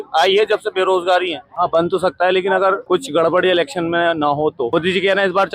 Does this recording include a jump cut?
yes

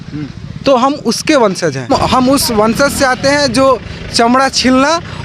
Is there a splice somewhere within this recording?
yes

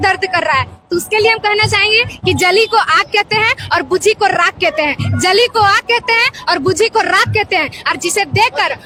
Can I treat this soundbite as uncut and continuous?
yes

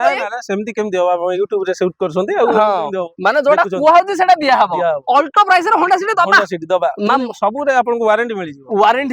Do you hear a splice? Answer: no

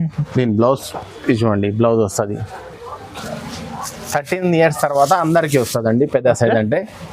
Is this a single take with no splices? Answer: no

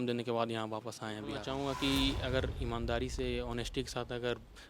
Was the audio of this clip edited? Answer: yes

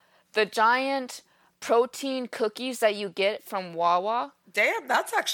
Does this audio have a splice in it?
yes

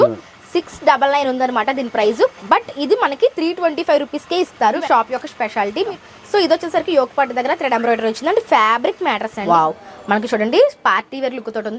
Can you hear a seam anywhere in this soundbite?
yes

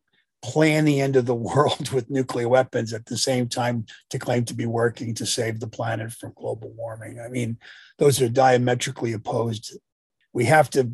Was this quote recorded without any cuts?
no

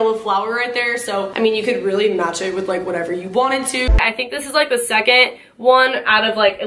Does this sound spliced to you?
yes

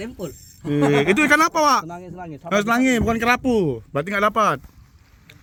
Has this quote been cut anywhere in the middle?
no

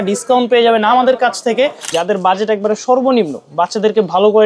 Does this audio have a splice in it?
yes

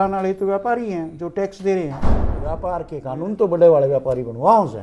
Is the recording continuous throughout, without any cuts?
no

